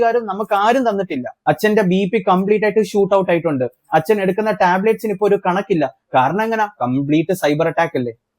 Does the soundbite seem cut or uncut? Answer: cut